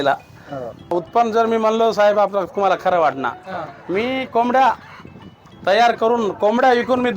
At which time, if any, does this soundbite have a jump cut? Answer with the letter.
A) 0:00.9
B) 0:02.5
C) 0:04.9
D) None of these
A